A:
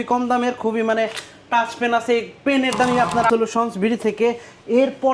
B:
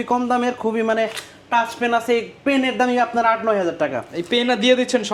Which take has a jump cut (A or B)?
A